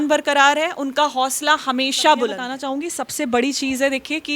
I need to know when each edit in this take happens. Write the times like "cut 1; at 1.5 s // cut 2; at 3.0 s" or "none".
cut 1; at 2.8 s